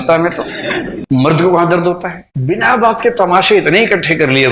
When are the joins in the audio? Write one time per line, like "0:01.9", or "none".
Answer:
0:00.9
0:02.2